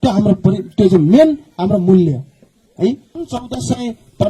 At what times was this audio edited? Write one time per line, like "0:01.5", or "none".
0:03.2